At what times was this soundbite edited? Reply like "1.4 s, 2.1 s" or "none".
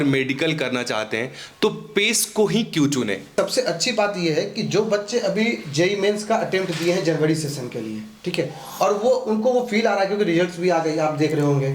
3.3 s